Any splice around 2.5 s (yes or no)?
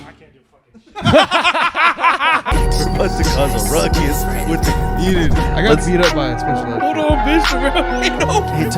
yes